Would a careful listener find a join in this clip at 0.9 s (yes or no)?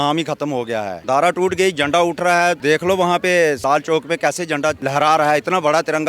yes